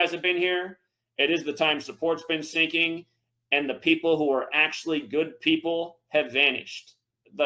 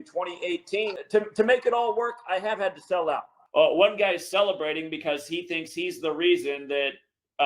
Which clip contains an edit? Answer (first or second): second